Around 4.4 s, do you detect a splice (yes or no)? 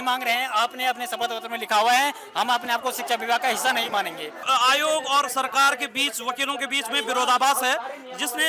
yes